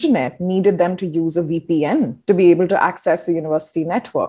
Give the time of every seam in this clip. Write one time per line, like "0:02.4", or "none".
0:02.2